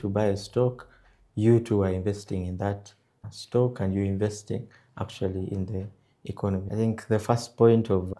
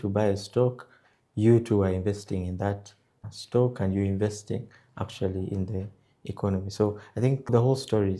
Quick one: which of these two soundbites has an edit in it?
first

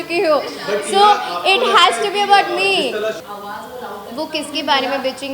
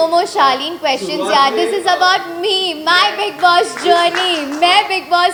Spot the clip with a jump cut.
first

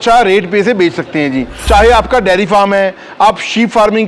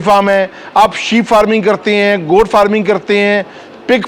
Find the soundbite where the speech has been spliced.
first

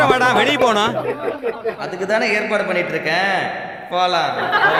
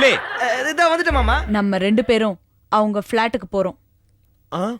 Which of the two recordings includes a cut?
second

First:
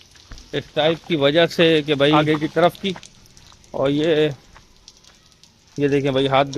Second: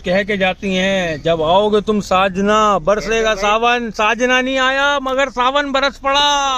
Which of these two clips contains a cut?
first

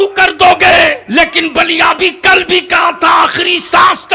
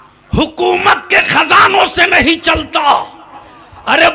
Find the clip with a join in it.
first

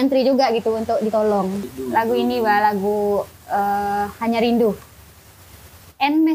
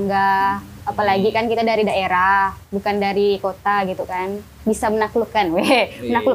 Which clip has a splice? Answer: first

